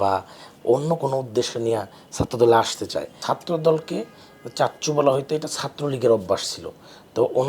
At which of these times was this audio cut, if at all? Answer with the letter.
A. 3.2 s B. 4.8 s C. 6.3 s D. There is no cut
A